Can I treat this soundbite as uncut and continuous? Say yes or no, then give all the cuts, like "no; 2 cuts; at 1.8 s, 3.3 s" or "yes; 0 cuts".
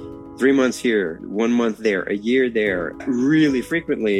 no; 2 cuts; at 1.2 s, 3.0 s